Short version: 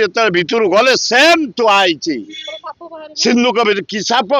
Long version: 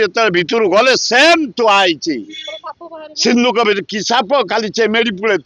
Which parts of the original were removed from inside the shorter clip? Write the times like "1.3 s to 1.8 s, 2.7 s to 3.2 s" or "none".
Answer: none

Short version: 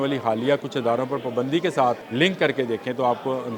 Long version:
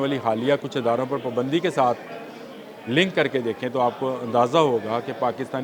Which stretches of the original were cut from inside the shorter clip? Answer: 2.0 s to 2.8 s

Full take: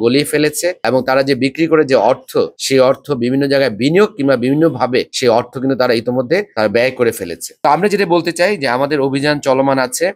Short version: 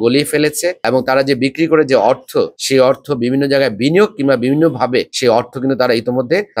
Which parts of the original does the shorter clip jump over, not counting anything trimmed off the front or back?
none

